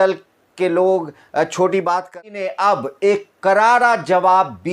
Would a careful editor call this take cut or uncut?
cut